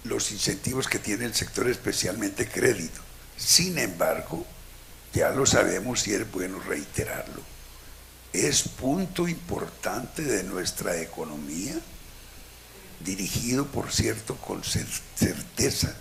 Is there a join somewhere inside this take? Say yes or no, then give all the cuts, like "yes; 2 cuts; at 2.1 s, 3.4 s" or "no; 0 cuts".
no; 0 cuts